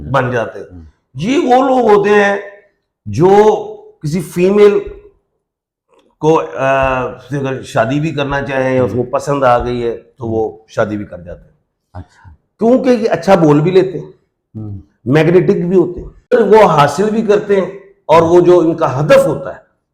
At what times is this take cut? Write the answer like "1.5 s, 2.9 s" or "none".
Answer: 16.3 s

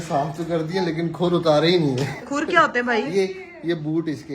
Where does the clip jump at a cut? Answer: 2.3 s

